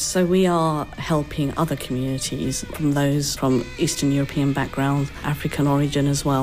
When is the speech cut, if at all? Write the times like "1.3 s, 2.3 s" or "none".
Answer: 1.0 s